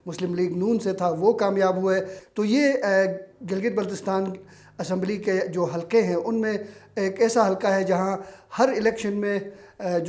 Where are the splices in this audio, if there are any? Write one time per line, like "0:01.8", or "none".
0:02.2